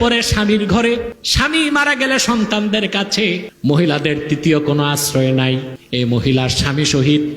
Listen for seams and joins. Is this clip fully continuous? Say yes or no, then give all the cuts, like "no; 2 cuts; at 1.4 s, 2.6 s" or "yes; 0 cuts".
no; 3 cuts; at 1.2 s, 3.5 s, 5.8 s